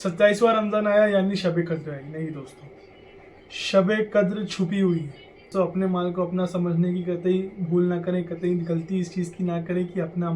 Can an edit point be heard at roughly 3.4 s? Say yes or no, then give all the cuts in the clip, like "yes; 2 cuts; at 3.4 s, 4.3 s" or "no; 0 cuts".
no; 1 cut; at 5.5 s